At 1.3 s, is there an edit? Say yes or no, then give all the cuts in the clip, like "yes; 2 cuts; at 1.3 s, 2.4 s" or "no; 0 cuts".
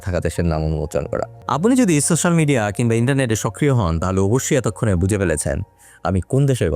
yes; 1 cut; at 1.3 s